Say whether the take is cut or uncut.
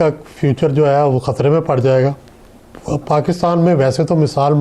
uncut